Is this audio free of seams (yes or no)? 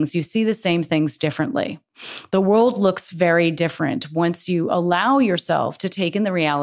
yes